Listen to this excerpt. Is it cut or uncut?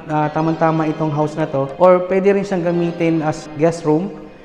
cut